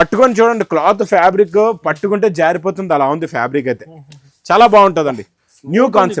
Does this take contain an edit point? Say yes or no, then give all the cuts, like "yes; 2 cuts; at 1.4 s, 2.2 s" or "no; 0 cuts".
no; 0 cuts